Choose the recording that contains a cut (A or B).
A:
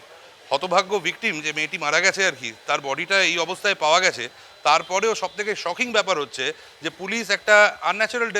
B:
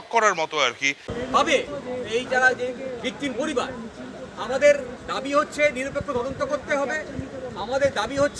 B